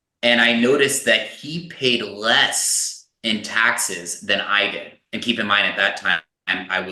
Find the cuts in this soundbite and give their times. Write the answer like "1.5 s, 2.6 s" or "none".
none